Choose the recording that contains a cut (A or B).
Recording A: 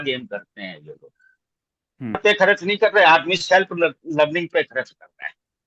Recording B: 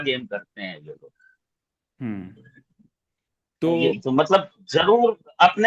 A